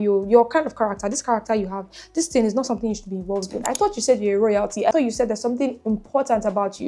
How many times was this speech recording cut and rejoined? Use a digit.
2